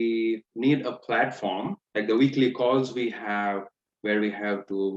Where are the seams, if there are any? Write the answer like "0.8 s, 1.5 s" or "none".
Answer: 1.8 s